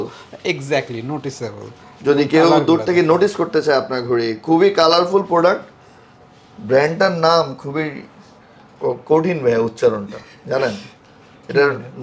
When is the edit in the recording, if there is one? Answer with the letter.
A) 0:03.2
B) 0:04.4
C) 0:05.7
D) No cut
D